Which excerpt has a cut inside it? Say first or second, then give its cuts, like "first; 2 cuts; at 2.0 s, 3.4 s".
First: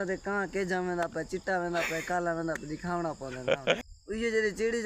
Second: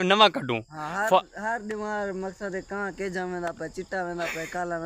first; 1 cut; at 3.9 s